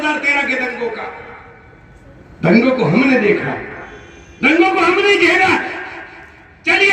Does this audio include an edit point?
no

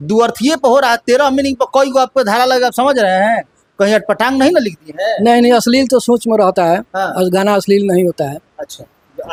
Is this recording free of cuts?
yes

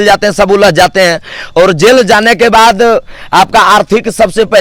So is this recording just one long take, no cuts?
yes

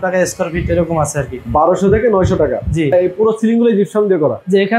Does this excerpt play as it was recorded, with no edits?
no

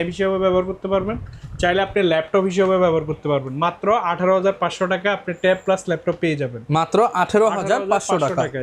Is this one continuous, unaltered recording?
yes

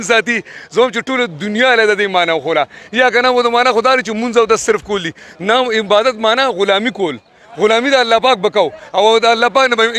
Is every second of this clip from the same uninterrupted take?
yes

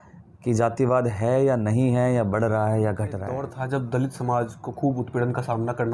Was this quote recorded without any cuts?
no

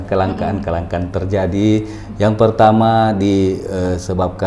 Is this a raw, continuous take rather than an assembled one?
yes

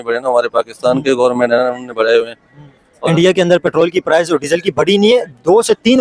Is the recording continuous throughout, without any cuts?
yes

